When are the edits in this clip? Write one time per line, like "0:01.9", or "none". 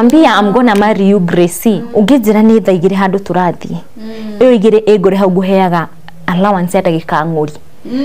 0:01.8